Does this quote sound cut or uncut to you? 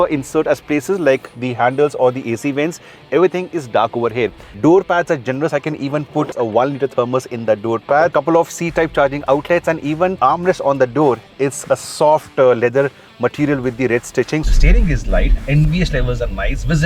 cut